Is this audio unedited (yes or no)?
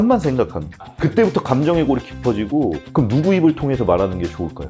no